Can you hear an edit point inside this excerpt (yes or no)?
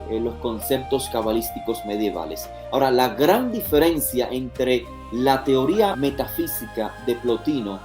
yes